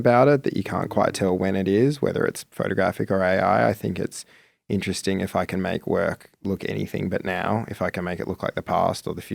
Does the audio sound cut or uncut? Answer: uncut